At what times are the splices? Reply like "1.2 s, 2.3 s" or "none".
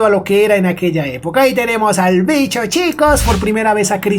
3.2 s